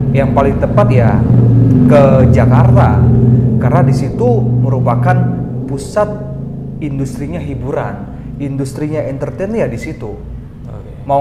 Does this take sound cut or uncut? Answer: uncut